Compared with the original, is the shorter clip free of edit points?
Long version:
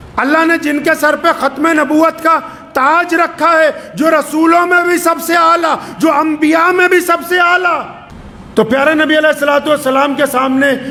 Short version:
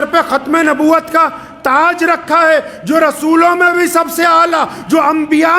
yes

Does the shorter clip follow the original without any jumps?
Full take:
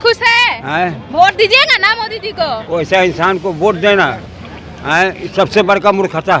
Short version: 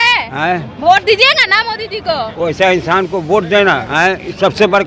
no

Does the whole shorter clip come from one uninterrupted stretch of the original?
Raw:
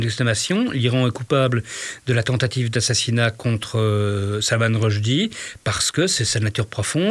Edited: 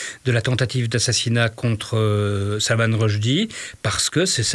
yes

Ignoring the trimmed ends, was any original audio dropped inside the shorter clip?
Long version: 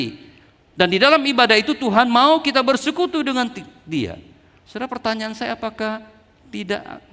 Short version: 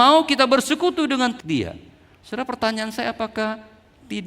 yes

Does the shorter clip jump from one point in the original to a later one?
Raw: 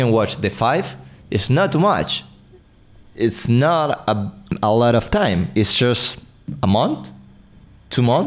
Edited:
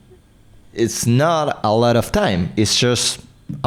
yes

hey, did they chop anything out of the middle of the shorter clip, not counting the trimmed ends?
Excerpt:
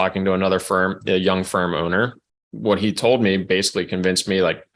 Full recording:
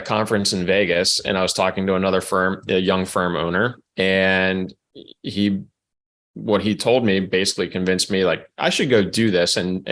yes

